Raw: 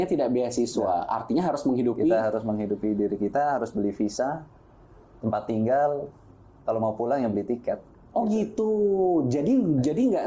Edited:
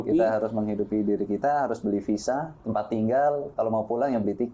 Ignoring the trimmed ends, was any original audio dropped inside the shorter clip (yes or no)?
yes